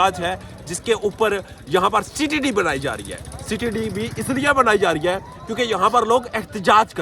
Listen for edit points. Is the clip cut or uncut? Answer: uncut